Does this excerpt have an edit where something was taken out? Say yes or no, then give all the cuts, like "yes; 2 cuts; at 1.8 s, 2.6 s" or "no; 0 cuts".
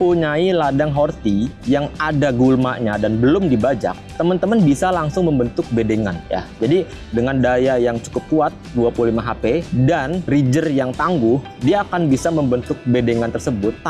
no; 0 cuts